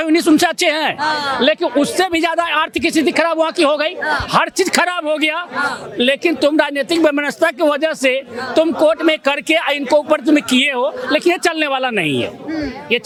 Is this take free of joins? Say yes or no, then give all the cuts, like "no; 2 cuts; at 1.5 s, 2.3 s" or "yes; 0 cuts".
yes; 0 cuts